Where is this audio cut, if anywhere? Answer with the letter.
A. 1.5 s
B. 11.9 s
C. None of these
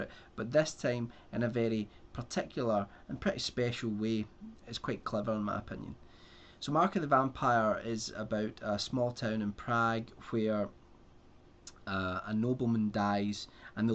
A